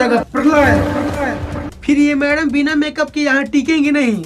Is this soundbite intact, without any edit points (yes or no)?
yes